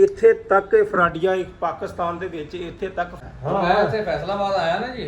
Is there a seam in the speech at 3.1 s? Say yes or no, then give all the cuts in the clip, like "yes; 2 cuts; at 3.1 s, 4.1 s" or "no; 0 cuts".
yes; 1 cut; at 3.1 s